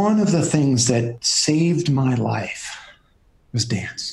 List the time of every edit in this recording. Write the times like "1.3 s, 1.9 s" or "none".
1.1 s